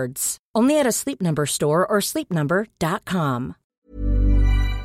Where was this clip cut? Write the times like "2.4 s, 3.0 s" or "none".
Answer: 3.6 s